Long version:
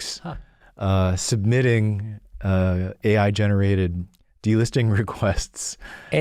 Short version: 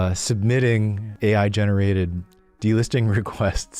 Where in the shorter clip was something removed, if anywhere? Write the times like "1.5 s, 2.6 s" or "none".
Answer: 1.1 s

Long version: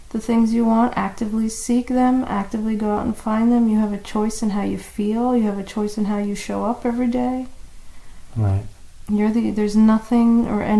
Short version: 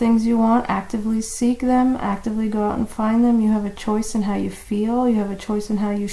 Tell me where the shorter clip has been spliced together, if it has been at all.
none

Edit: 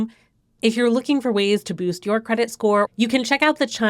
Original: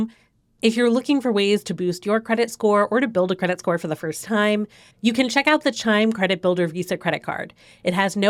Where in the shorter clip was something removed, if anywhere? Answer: 2.9 s

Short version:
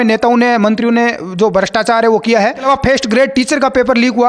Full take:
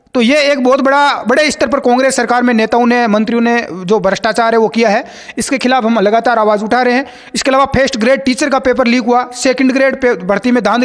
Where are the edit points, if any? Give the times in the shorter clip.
2.6 s

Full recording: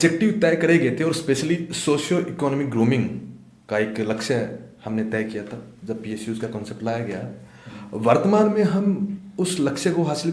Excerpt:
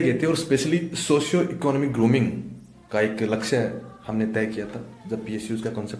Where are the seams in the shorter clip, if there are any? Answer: none

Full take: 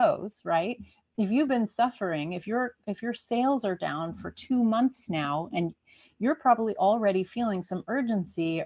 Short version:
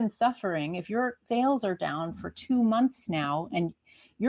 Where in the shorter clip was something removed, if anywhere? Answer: 1.2 s

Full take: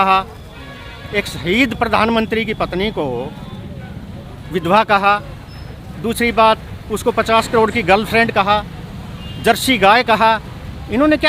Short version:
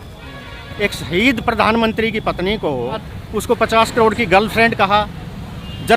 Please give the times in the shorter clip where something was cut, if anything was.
3.2 s

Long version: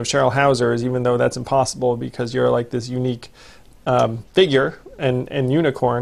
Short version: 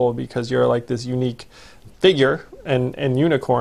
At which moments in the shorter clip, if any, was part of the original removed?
1.9 s

